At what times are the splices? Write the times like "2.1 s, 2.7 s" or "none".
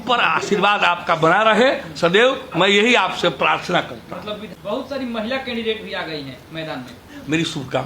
4.5 s